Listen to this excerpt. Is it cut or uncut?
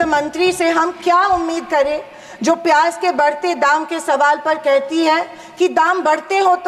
uncut